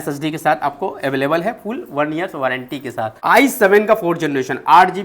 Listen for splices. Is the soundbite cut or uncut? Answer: cut